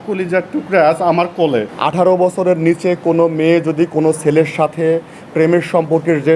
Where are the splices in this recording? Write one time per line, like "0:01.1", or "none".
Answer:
0:01.7